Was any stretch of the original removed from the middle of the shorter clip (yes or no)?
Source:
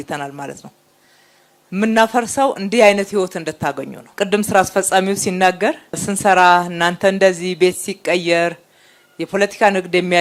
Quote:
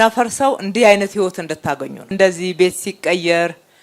yes